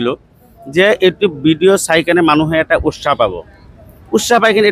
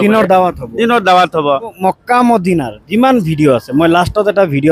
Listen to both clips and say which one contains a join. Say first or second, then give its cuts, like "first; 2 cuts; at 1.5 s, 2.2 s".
second; 1 cut; at 1.8 s